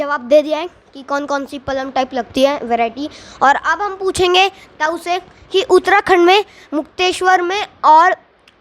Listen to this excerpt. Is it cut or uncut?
uncut